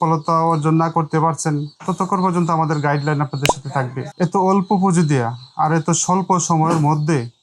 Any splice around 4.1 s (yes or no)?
yes